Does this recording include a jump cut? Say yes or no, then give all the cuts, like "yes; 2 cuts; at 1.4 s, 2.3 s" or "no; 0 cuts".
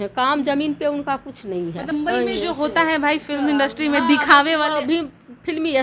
yes; 1 cut; at 1.9 s